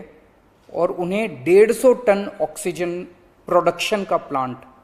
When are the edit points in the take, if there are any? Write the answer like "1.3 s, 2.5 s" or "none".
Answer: none